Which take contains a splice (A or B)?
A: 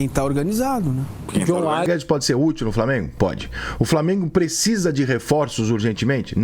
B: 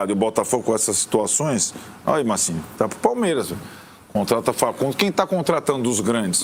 A